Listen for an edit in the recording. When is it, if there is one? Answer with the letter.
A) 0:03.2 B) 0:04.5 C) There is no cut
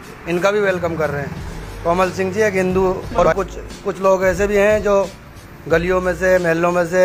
A